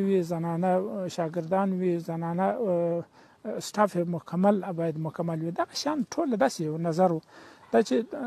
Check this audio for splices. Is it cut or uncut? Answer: uncut